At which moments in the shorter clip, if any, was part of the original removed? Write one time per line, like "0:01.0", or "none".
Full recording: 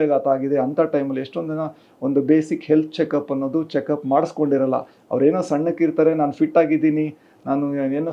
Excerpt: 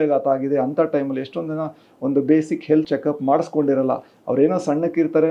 0:02.9

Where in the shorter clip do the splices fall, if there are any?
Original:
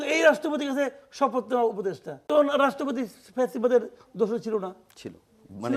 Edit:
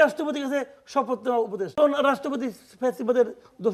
0:01.7

